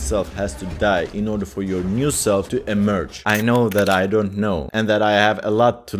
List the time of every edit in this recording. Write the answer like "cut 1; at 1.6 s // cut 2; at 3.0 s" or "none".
cut 1; at 2.8 s